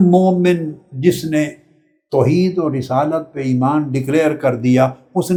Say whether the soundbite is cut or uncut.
uncut